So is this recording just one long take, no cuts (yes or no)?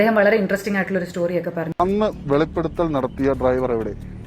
no